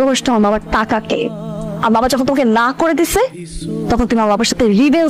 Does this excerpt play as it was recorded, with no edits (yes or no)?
yes